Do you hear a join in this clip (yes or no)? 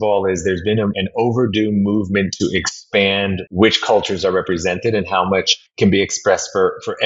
yes